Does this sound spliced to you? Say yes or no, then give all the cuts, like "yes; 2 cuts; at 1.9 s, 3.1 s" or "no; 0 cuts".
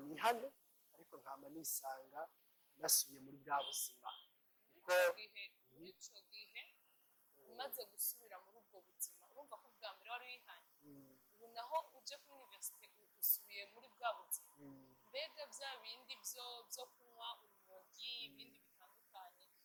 no; 0 cuts